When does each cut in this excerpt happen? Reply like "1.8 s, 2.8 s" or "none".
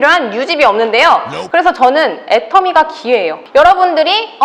1.4 s, 3.4 s